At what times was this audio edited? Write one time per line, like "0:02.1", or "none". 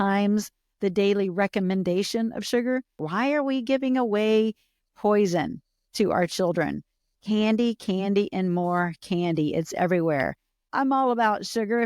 0:03.0
0:10.7